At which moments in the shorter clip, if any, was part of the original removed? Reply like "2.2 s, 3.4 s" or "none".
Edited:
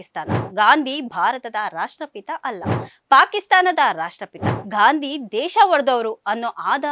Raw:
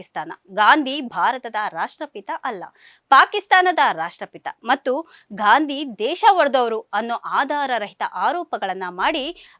4.5 s